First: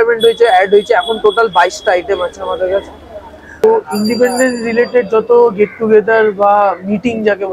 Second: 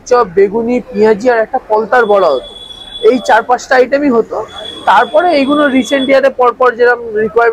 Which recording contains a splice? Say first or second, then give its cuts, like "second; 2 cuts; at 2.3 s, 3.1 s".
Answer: first; 1 cut; at 3.6 s